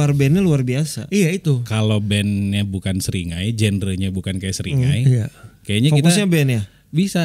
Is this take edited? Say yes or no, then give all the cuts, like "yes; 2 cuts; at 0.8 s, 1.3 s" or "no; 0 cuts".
yes; 1 cut; at 1.7 s